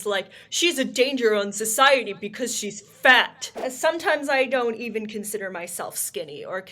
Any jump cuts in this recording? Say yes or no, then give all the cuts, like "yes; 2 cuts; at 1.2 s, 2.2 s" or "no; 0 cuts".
yes; 1 cut; at 3.4 s